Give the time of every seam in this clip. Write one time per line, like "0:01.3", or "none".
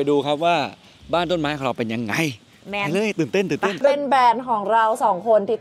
0:03.8